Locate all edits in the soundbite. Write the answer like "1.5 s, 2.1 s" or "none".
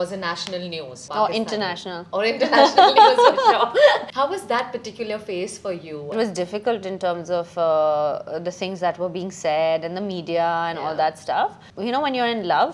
1.0 s, 4.1 s, 6.1 s, 11.7 s